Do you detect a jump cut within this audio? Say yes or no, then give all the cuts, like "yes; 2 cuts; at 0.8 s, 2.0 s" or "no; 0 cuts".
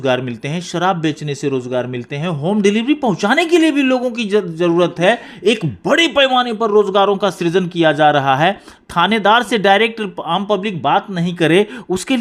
no; 0 cuts